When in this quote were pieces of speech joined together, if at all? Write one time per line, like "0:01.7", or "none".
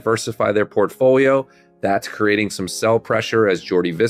none